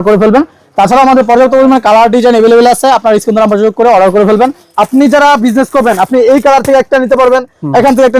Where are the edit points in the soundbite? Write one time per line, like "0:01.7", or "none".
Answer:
0:04.7